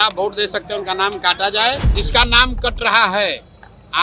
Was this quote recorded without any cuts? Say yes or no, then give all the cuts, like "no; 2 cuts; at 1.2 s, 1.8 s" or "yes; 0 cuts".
no; 1 cut; at 1.9 s